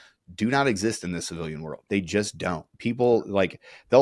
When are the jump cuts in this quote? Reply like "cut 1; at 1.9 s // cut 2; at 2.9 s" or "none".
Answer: cut 1; at 1.7 s